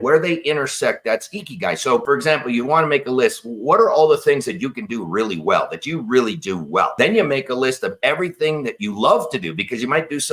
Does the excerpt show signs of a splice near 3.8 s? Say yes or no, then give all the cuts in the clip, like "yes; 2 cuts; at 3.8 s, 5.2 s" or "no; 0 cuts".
no; 2 cuts; at 2.0 s, 6.9 s